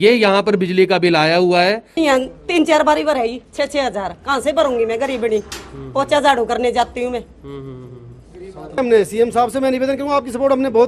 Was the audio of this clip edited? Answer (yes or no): yes